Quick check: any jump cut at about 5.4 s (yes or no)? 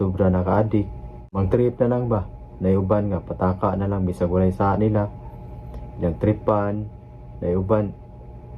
no